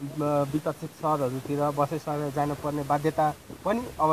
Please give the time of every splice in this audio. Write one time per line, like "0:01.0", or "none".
none